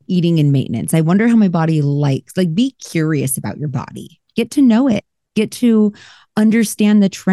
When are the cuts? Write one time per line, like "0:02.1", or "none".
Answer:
0:04.2